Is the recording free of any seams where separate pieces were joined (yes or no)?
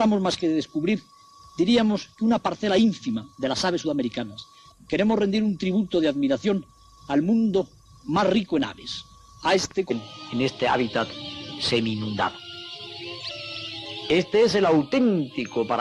yes